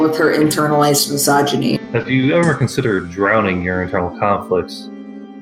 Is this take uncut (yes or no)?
no